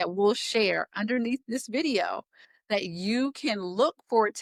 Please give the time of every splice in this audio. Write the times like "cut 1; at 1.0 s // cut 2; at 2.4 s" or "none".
none